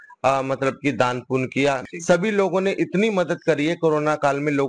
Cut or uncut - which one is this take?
cut